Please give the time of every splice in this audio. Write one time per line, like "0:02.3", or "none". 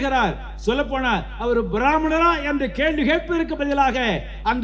none

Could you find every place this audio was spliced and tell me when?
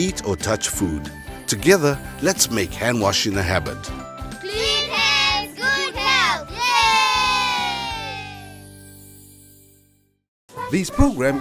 0:10.4

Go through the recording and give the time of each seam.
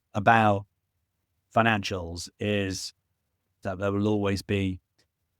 0:03.6

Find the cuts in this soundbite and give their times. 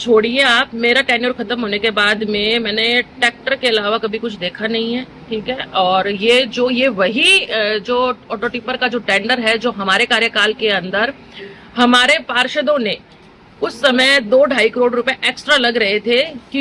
none

